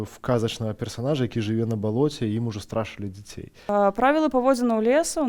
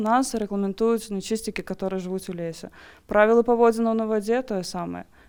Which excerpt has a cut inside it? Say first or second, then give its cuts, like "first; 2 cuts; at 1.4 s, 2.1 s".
first; 1 cut; at 3.6 s